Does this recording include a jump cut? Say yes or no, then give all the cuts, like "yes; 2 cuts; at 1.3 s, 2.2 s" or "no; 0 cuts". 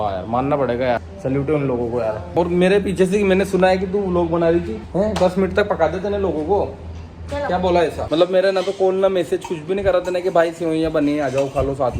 yes; 4 cuts; at 1.0 s, 2.3 s, 4.8 s, 8.0 s